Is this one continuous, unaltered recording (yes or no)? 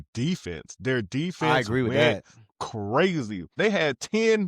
no